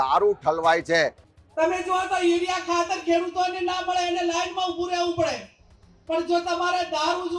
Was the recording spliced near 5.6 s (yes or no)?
no